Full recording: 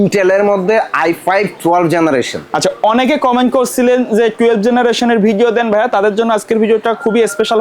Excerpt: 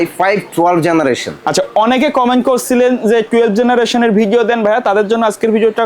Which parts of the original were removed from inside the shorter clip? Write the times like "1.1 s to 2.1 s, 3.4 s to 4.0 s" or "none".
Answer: none